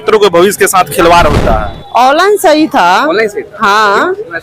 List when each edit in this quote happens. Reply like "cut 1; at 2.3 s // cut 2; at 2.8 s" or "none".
cut 1; at 1.4 s